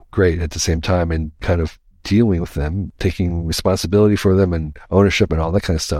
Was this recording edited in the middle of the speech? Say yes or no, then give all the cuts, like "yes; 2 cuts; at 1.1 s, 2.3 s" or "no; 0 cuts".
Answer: yes; 2 cuts; at 1.4 s, 2.9 s